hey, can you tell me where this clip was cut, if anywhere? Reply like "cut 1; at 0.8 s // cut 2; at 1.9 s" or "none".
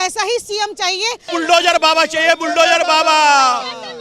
cut 1; at 1.3 s